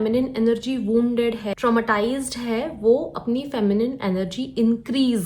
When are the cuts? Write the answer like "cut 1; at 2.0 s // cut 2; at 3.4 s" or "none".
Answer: cut 1; at 1.5 s